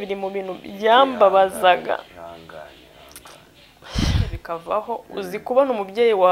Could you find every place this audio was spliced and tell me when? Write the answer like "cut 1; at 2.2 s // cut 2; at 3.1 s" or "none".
cut 1; at 4.4 s